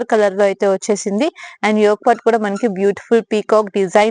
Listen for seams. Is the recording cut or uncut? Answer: uncut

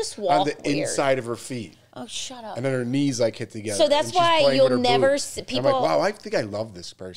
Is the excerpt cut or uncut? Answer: uncut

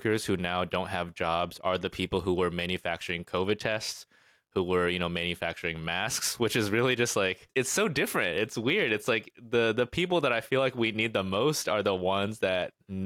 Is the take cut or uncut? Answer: uncut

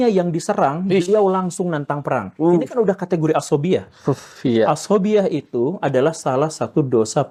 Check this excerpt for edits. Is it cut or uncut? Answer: uncut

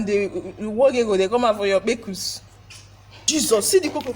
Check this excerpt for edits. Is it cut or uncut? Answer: cut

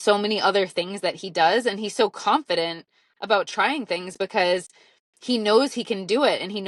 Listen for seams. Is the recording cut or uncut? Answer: uncut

